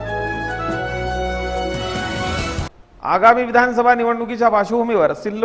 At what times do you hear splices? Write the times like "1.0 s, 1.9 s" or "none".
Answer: 2.6 s